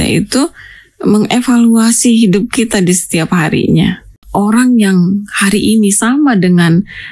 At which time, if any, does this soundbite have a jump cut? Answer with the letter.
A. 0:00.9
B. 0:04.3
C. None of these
B